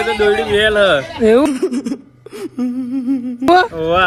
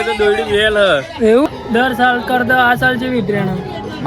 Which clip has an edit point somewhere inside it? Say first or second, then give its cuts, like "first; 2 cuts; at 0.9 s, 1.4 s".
second; 1 cut; at 1.5 s